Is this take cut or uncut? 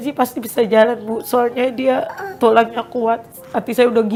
uncut